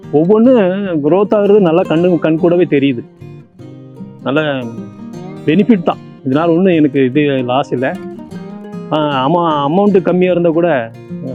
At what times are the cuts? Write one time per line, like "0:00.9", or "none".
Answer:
none